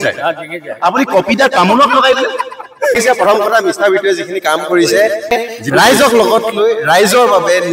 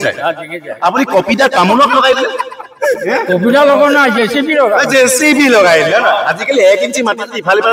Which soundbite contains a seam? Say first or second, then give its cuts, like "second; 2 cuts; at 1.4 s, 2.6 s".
first; 2 cuts; at 3.0 s, 5.3 s